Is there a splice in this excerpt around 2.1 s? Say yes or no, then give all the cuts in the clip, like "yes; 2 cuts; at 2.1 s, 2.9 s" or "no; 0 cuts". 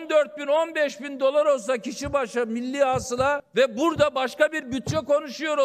no; 1 cut; at 3.4 s